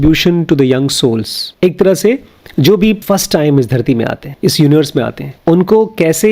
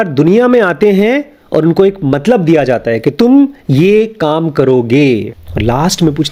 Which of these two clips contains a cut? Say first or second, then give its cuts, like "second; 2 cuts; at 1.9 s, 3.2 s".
first; 3 cuts; at 1.4 s, 4.2 s, 5.3 s